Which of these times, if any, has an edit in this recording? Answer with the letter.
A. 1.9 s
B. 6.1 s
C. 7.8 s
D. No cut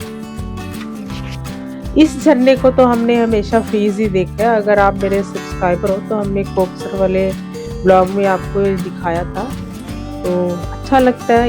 A